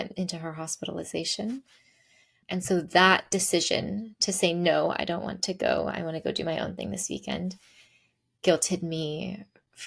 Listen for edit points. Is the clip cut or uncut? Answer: uncut